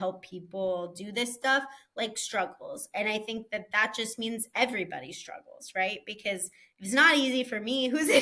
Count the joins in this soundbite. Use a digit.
0